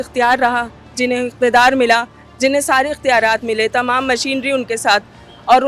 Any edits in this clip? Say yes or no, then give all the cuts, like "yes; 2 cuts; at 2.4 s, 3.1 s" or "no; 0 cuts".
no; 0 cuts